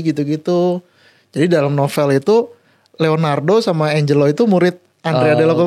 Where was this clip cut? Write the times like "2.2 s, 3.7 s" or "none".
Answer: none